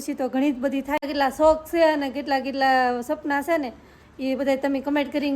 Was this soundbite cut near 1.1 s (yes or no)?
yes